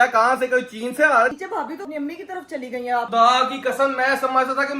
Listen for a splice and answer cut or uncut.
cut